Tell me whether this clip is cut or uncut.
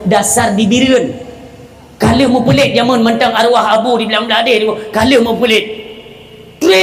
uncut